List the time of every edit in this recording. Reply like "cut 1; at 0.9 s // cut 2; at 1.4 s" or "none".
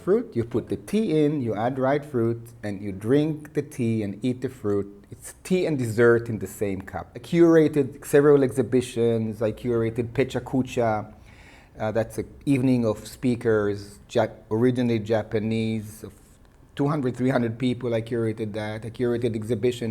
cut 1; at 7.1 s